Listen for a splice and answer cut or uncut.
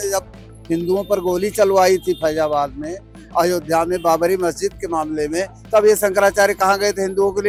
uncut